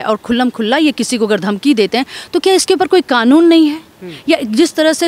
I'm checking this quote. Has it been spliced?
no; 0 cuts

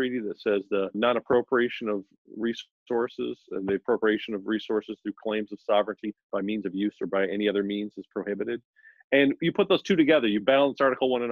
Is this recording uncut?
no; 1 cut; at 1.0 s

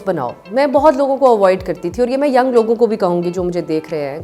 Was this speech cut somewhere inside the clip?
no; 0 cuts

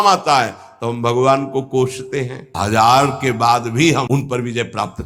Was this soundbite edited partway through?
yes; 2 cuts; at 2.5 s, 4.1 s

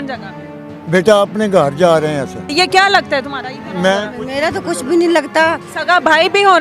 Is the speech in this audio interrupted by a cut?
yes; 2 cuts; at 2.5 s, 5.7 s

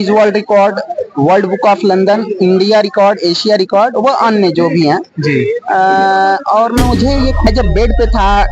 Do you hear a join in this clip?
yes; 1 cut; at 7.5 s

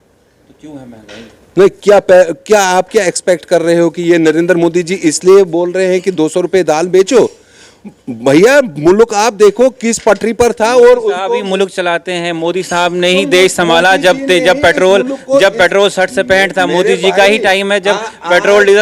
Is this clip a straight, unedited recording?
yes; 0 cuts

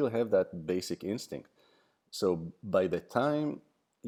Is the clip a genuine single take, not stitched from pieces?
yes; 0 cuts

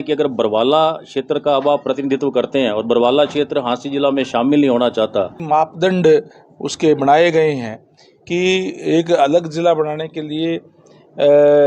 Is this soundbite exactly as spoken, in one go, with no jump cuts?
no; 1 cut; at 5.4 s

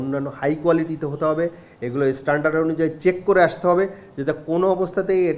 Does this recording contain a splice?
no; 0 cuts

